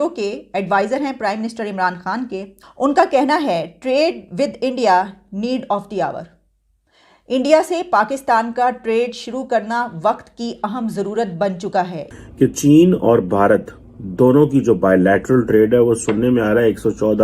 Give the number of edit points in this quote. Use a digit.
2